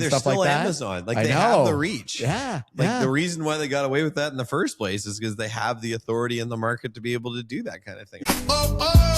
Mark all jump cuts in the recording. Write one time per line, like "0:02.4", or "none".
0:08.1